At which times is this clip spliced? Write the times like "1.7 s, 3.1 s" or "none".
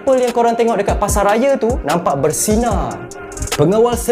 none